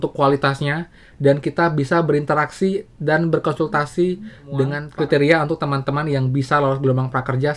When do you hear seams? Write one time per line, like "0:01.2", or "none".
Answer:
0:04.8